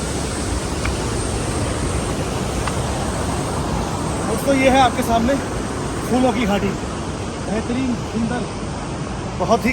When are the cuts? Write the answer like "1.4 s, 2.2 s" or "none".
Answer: none